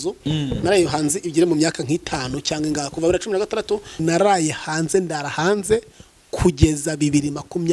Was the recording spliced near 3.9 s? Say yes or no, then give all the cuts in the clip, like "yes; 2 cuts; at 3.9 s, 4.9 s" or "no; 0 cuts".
yes; 1 cut; at 3.9 s